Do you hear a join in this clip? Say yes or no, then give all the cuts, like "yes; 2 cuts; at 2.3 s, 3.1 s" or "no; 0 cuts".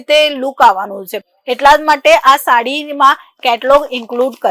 no; 0 cuts